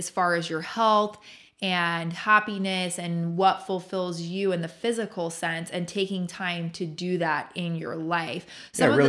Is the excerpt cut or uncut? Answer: uncut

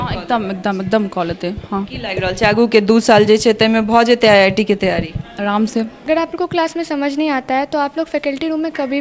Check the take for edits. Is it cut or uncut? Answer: cut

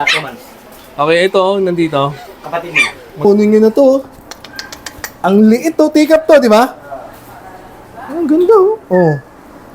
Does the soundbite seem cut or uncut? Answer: cut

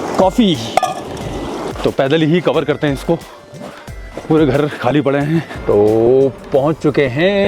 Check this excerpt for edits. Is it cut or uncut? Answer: cut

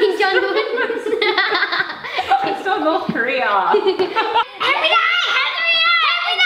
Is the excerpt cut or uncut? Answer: cut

